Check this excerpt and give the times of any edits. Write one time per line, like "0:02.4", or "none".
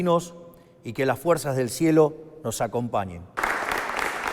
0:03.4